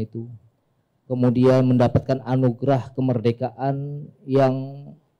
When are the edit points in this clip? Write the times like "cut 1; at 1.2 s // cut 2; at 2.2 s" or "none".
none